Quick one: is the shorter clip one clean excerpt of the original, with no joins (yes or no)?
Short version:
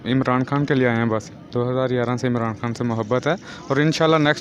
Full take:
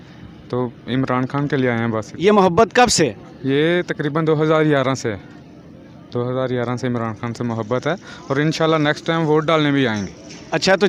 no